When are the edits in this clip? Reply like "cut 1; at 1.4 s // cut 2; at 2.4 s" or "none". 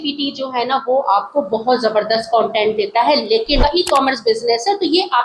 cut 1; at 3.6 s